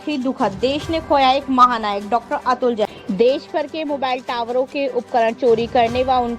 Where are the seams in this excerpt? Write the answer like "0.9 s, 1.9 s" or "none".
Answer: 2.8 s